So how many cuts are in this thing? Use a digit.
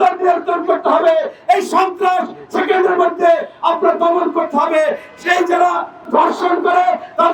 1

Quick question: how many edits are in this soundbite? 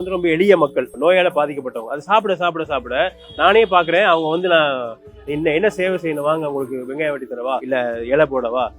2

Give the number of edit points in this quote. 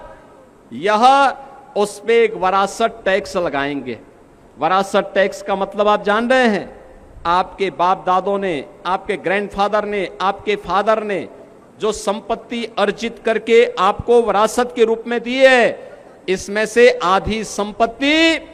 0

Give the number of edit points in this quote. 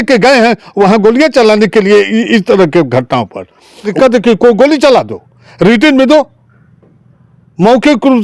1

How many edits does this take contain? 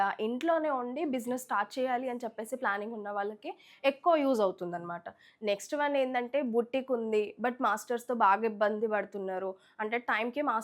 0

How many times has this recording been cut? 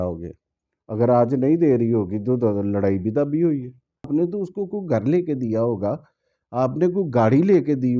1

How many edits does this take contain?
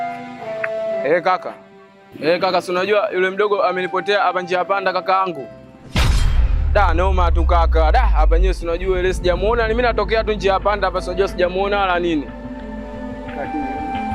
1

